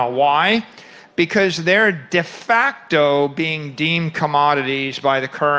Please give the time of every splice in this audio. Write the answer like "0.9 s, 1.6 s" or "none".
none